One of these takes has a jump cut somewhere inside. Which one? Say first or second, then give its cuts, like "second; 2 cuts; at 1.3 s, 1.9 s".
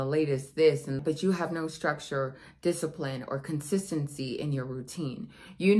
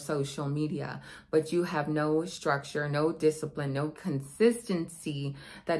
first; 1 cut; at 1.0 s